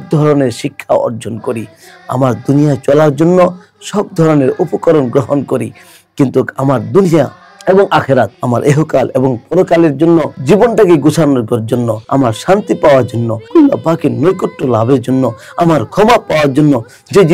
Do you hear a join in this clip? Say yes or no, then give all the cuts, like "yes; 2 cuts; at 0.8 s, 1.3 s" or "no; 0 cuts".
yes; 4 cuts; at 8.4 s, 10.3 s, 12.0 s, 13.4 s